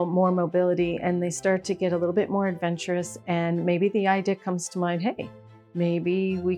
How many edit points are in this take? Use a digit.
0